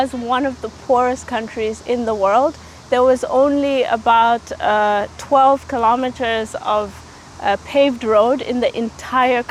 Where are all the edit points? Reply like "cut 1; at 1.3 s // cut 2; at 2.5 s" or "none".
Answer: none